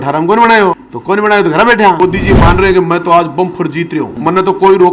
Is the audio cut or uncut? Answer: cut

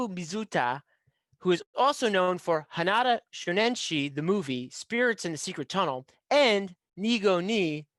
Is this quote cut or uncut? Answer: uncut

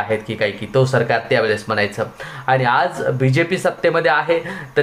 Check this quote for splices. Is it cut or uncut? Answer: uncut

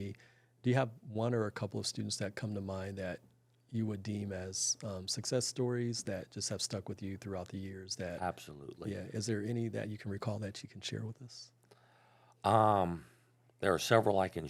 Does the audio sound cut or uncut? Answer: uncut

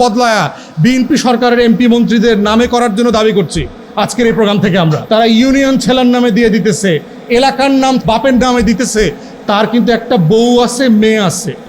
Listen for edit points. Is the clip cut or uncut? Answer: cut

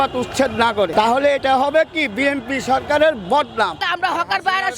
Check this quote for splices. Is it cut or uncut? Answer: cut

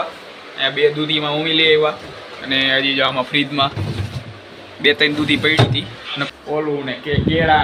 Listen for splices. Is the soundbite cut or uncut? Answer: cut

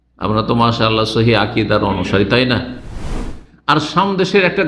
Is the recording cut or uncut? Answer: cut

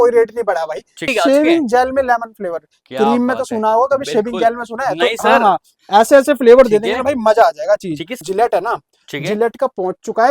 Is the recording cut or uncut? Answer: cut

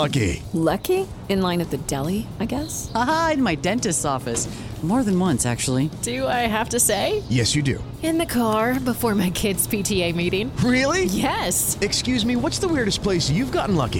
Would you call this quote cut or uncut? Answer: uncut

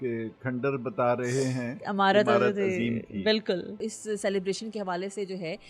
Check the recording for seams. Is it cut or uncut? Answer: cut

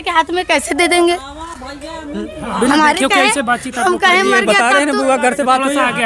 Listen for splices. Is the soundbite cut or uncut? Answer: uncut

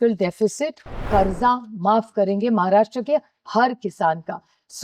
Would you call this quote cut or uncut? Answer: cut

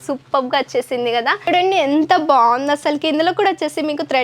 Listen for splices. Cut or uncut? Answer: cut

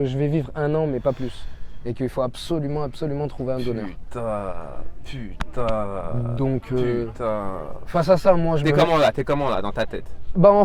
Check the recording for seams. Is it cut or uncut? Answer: uncut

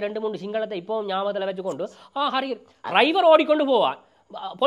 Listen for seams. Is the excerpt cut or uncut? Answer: uncut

